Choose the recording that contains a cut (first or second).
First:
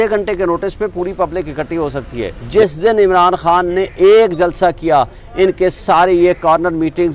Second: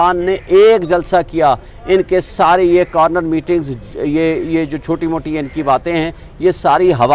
first